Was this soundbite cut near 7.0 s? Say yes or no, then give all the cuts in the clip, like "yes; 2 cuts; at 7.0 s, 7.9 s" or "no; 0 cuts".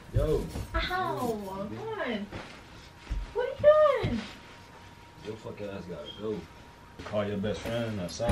yes; 1 cut; at 7.0 s